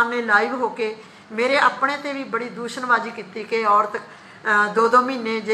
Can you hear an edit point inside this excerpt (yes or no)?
no